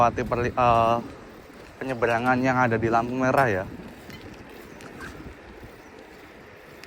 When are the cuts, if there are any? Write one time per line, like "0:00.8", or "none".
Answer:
none